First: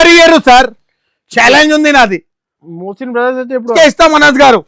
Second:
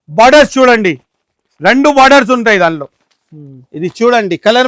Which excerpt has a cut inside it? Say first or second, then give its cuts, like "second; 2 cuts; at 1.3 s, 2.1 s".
first; 1 cut; at 3.7 s